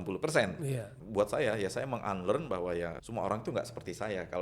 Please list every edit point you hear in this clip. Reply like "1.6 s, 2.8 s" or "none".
1.0 s, 3.0 s